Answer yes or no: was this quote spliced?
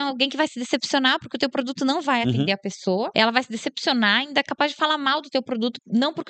yes